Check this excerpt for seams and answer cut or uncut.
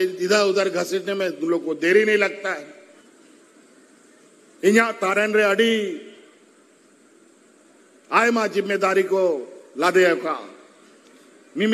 cut